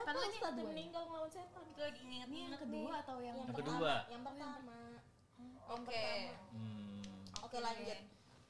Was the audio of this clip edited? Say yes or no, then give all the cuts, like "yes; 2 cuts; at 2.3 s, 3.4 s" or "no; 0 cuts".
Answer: no; 0 cuts